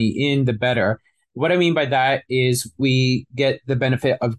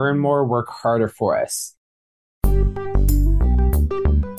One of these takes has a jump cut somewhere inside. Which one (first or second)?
second